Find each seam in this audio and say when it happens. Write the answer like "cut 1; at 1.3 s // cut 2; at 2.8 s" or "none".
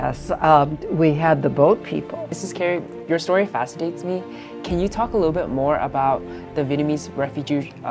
cut 1; at 2.1 s